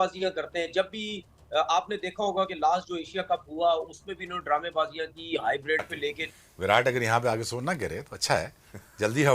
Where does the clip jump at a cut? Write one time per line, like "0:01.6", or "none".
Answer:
0:06.2